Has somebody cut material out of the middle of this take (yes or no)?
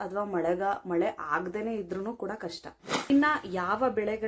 yes